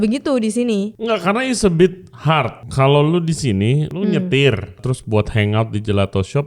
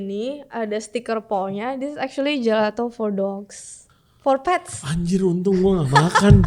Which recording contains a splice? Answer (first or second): first